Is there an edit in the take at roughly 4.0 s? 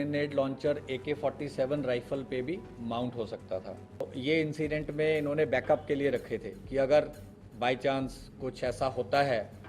yes; 1 cut; at 4.0 s

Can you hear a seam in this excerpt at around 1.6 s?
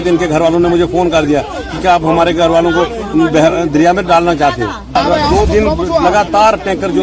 no; 1 cut; at 5.0 s

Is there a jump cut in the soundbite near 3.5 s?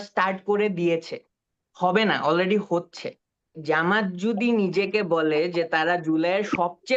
yes; 1 cut; at 3.5 s

